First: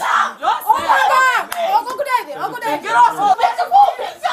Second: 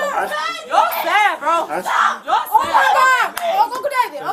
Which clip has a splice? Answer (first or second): first